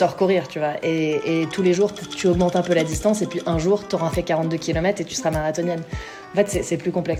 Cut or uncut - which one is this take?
uncut